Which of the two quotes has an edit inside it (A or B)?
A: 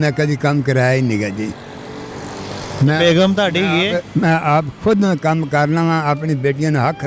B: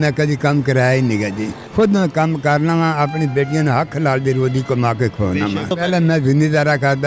B